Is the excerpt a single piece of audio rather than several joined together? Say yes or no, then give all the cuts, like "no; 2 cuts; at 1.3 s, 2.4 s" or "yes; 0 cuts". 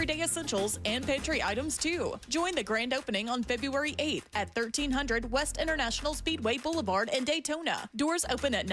yes; 0 cuts